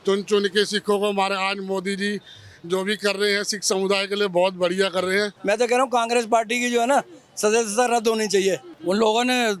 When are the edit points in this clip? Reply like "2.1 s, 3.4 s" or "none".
5.3 s, 8.7 s